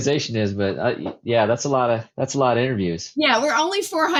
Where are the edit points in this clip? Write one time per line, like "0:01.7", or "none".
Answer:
none